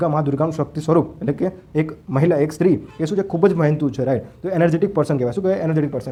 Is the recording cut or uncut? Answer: uncut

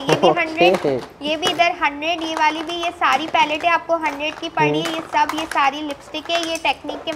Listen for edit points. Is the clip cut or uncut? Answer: uncut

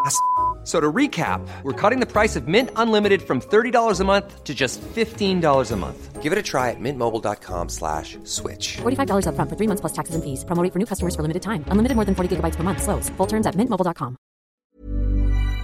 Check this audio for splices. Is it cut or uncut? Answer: cut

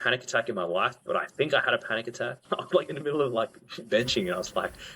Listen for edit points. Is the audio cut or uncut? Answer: cut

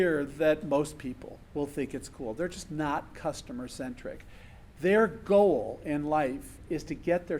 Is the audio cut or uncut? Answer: uncut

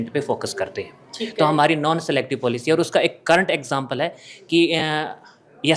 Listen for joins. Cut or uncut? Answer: uncut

